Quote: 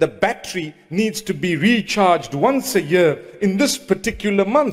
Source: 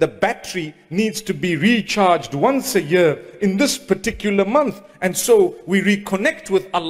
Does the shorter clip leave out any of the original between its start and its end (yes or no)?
no